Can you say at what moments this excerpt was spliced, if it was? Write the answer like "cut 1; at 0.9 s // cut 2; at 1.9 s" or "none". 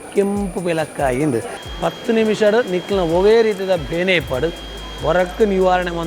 cut 1; at 1.6 s